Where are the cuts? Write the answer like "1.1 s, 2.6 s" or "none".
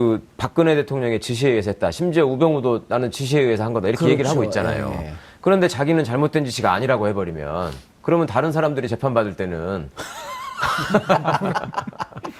1.1 s